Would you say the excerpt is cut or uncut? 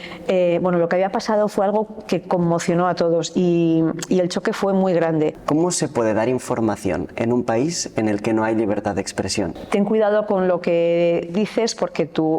cut